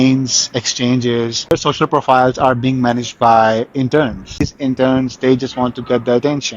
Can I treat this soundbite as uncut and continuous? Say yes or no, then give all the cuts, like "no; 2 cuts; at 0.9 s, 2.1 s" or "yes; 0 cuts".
no; 2 cuts; at 1.5 s, 4.5 s